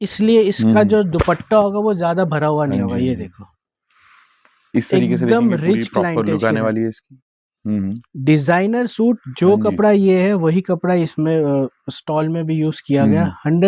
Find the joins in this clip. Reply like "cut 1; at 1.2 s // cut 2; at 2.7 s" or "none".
none